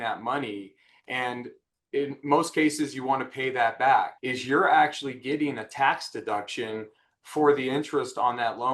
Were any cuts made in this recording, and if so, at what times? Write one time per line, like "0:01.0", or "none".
0:04.2